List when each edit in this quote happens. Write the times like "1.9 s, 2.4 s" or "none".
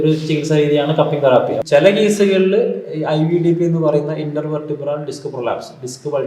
1.6 s